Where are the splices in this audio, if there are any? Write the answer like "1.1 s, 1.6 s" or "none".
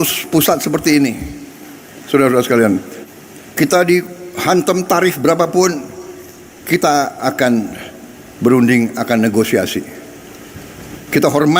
3.0 s